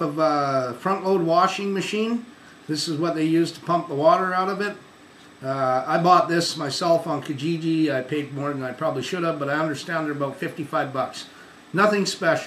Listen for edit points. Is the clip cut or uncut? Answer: cut